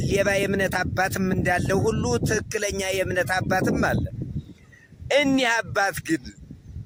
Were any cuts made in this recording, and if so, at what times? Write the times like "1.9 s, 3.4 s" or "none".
none

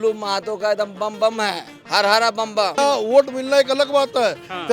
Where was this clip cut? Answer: 1.7 s, 2.8 s

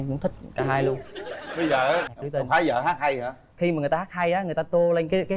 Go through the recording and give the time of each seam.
2.1 s

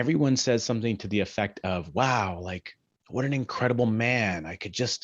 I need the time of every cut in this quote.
none

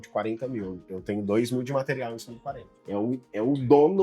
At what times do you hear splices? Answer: 2.7 s

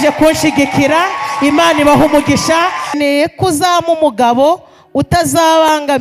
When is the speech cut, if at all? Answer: 2.9 s

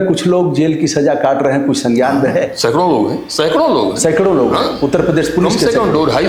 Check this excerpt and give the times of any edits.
none

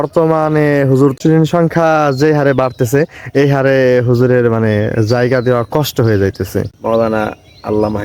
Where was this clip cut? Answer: 1.2 s, 6.7 s

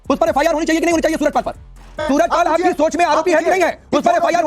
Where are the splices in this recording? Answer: 2.0 s

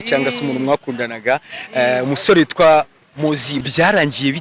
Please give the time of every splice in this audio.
3.5 s

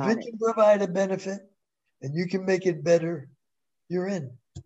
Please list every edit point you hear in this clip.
none

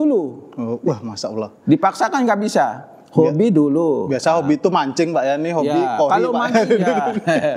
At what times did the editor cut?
none

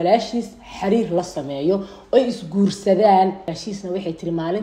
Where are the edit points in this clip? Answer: 3.6 s

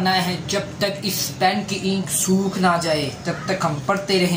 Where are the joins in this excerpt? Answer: none

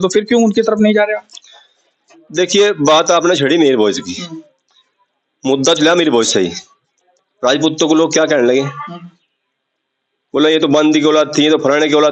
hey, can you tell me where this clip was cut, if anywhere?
none

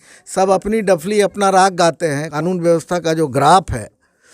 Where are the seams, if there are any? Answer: 2.3 s

